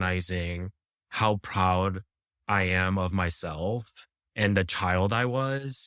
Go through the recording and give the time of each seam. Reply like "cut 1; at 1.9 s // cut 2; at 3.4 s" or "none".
cut 1; at 4.2 s